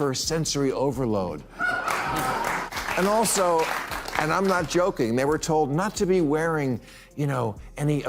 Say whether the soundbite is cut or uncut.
cut